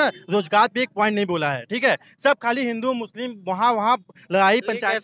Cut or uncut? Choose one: uncut